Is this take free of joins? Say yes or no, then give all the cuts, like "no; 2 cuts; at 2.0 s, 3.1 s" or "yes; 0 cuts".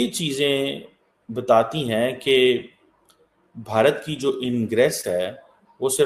yes; 0 cuts